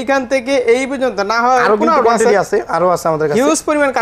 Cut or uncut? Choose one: uncut